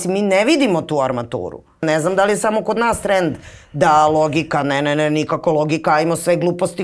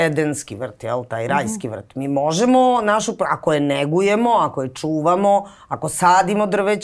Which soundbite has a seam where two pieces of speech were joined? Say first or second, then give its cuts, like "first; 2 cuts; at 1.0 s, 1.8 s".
first; 1 cut; at 1.8 s